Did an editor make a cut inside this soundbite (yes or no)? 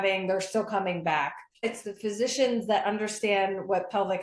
yes